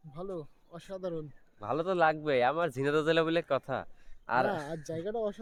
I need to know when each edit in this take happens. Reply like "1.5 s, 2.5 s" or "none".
none